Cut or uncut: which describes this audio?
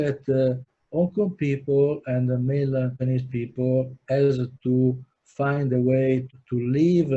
uncut